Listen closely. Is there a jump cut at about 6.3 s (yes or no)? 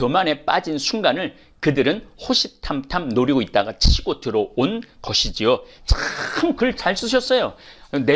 no